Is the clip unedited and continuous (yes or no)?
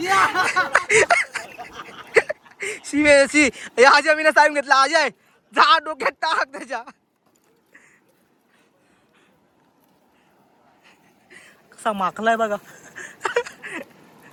yes